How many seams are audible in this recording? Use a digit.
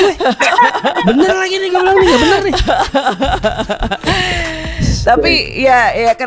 0